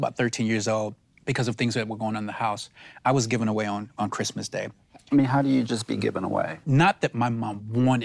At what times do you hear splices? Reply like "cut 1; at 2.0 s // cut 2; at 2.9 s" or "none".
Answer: cut 1; at 4.7 s // cut 2; at 6.6 s